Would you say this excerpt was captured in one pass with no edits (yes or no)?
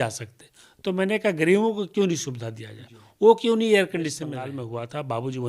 no